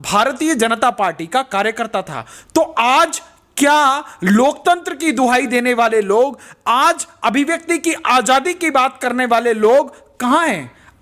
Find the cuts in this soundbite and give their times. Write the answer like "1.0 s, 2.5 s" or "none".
none